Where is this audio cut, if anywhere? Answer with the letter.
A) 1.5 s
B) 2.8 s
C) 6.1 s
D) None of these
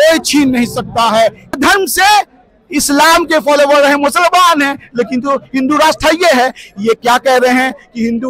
A